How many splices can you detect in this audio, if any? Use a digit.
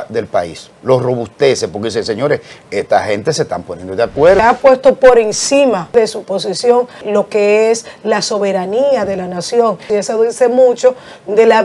4